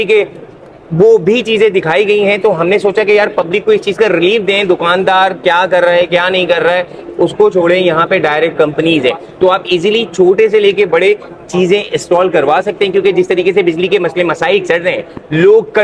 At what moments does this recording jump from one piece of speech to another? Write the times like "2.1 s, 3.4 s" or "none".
none